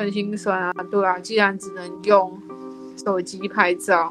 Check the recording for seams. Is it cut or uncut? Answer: uncut